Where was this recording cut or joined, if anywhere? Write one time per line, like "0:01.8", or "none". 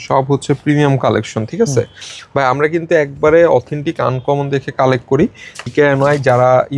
0:05.6